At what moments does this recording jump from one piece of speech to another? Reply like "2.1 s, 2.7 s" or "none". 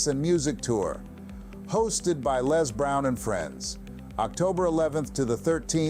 2.4 s